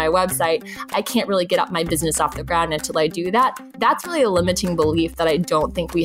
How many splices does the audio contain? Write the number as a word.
one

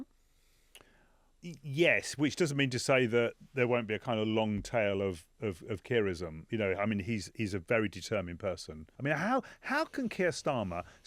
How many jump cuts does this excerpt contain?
two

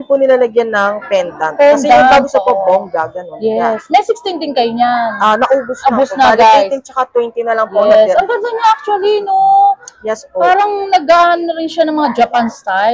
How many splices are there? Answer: zero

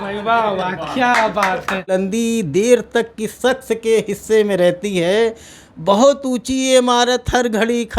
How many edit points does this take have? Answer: one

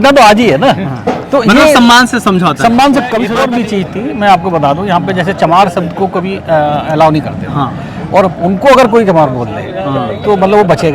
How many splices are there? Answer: one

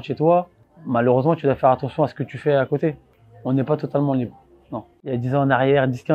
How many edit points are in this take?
one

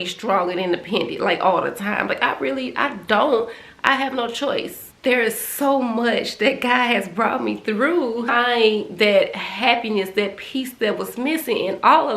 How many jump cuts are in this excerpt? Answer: two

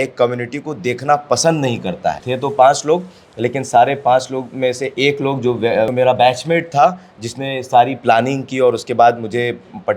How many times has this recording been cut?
two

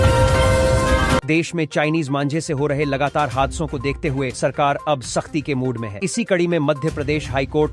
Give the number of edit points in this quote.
one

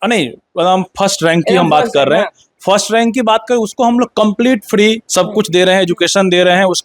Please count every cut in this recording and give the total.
one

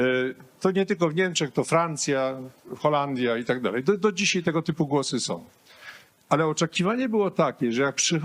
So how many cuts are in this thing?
zero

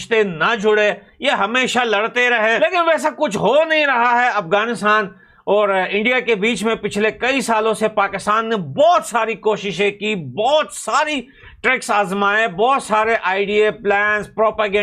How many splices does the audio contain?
one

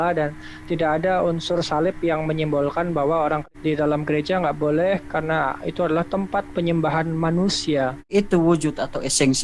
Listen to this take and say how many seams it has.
two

